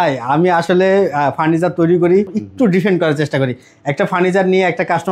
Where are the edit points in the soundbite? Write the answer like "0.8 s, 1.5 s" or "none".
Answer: 2.4 s